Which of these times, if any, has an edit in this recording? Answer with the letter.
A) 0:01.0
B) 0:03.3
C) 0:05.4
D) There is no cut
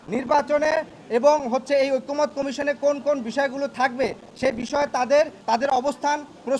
C